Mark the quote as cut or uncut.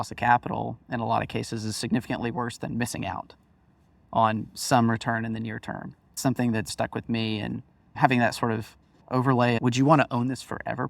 cut